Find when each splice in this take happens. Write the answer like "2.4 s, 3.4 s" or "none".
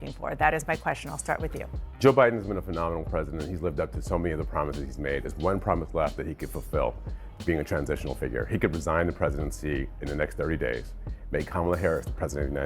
8.8 s